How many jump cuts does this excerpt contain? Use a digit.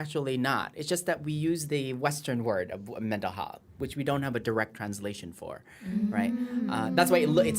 0